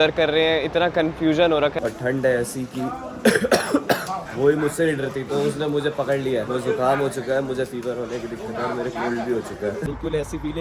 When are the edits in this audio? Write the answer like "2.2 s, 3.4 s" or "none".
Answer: 1.7 s, 9.9 s